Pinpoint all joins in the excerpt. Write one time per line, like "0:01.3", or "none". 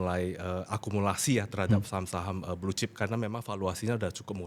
none